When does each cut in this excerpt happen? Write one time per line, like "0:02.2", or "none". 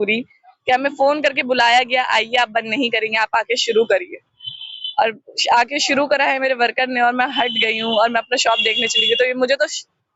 none